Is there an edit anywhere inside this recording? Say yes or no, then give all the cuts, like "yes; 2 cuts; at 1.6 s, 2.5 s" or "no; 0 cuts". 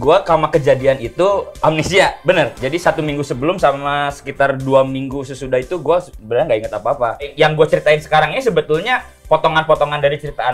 yes; 2 cuts; at 1.6 s, 7.3 s